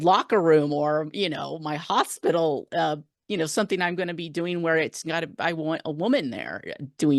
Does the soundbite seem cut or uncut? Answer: uncut